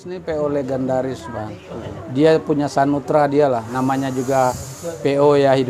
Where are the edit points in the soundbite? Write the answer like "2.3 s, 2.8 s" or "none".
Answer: 3.7 s